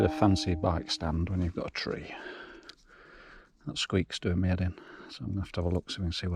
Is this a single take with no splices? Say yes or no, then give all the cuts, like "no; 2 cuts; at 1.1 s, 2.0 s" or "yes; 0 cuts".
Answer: yes; 0 cuts